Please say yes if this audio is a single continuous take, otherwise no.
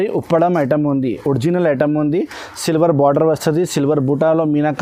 yes